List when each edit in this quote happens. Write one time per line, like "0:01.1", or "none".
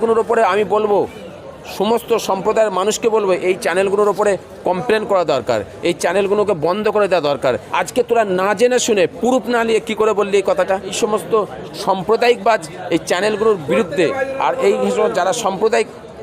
0:07.6
0:10.9